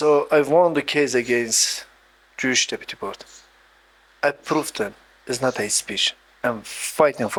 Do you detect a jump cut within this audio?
no; 0 cuts

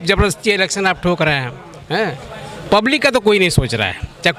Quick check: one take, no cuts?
yes; 0 cuts

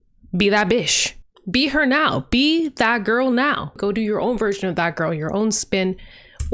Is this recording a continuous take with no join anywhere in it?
no; 1 cut; at 1.3 s

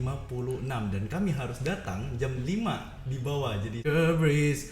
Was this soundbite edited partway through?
yes; 1 cut; at 3.8 s

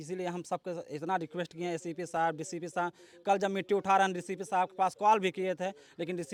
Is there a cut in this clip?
no; 0 cuts

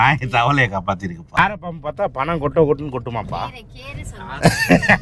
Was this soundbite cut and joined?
yes; 1 cut; at 1.2 s

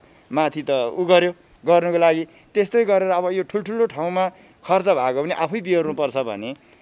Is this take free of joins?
yes; 0 cuts

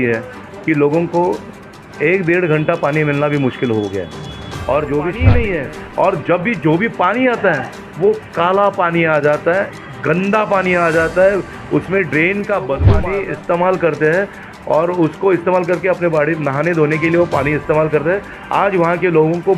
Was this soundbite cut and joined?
yes; 2 cuts; at 5.2 s, 13.1 s

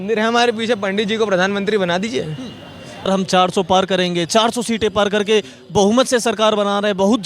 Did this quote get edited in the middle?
yes; 1 cut; at 3.1 s

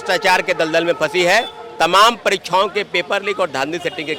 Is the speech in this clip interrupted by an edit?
no; 0 cuts

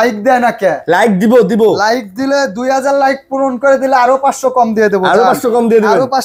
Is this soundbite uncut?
yes; 0 cuts

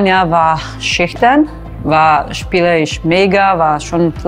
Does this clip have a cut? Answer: no; 0 cuts

